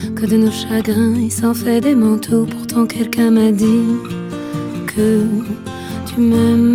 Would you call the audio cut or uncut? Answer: uncut